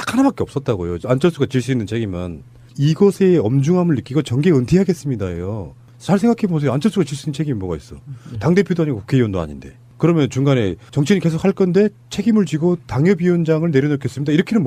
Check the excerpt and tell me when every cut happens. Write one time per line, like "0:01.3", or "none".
none